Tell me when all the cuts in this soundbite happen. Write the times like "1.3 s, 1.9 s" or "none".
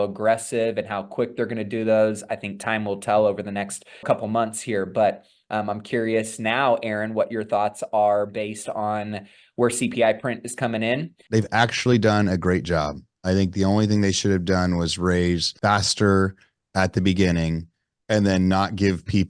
4.0 s, 11.1 s, 15.5 s